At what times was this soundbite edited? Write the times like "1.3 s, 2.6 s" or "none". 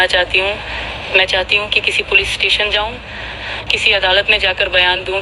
none